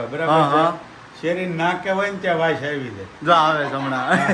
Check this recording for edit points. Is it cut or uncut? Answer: uncut